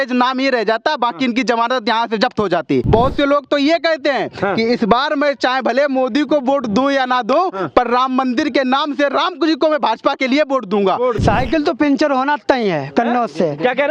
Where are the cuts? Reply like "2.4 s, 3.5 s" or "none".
2.9 s, 11.2 s